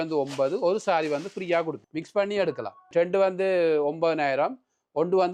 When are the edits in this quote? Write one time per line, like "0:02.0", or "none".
0:01.8
0:02.9